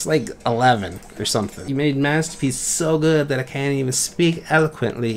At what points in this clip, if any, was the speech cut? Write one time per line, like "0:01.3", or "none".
0:01.6